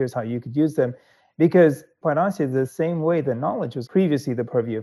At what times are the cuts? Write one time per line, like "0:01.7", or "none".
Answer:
0:01.9
0:03.8

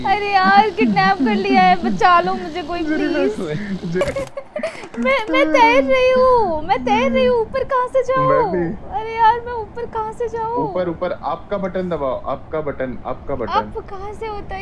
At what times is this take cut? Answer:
0:04.0

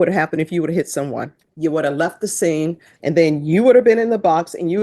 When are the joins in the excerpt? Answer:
0:01.4
0:02.9

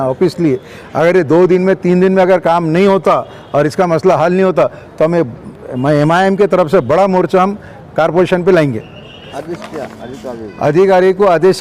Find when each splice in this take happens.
0:09.2

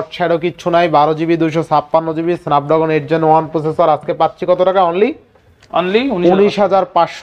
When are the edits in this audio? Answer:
none

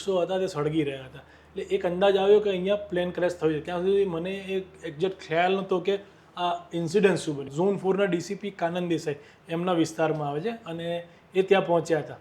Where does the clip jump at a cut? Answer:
0:07.5

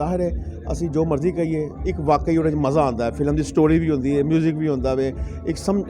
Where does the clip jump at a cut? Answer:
none

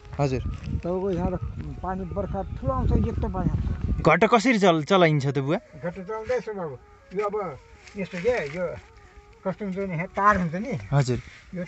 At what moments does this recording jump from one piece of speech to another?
0:04.0

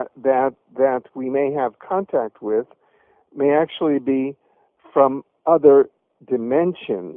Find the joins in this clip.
0:04.9

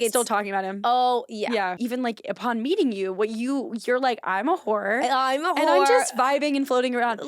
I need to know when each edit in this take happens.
0:01.8

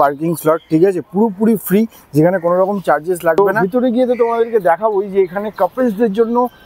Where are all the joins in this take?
0:03.4

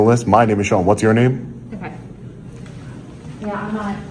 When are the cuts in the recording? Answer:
none

